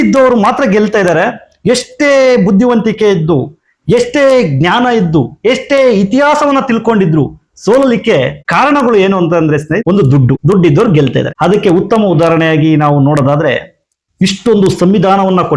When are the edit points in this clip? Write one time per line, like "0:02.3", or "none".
0:08.4
0:10.2
0:11.3